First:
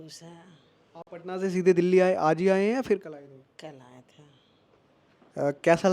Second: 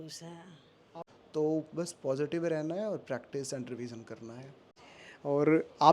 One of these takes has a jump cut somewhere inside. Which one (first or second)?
second